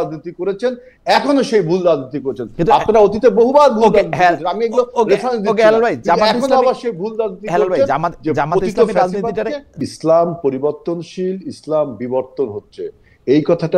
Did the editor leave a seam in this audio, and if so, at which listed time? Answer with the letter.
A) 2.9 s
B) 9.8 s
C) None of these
B